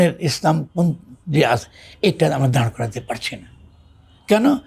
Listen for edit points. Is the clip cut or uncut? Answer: uncut